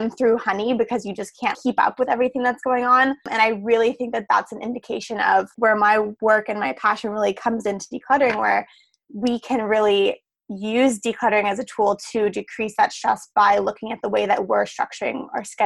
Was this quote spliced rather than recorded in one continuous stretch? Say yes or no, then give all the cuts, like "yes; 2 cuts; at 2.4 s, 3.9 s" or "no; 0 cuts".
yes; 3 cuts; at 1.5 s, 3.3 s, 5.5 s